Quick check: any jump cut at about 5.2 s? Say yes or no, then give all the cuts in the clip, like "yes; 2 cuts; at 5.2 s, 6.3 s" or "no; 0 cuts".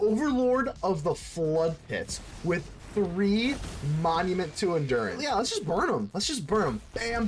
yes; 1 cut; at 5.2 s